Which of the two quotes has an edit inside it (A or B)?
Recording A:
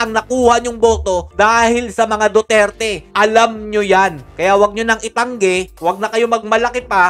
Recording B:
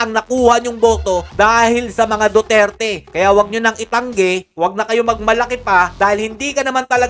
B